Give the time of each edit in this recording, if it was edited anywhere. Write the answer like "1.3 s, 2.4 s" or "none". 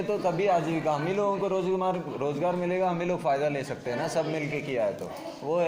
none

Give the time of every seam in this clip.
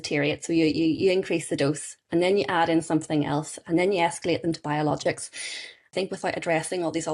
5.9 s

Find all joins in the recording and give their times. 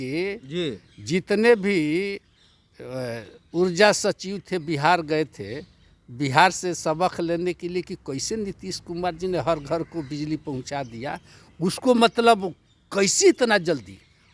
none

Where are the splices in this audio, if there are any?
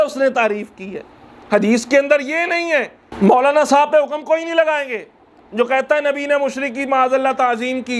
3.0 s

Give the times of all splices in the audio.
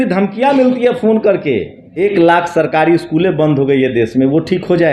1.8 s

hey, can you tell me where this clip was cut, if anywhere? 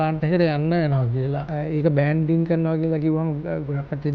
1.4 s

